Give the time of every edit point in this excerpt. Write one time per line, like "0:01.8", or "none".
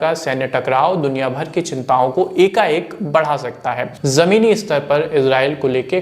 0:03.9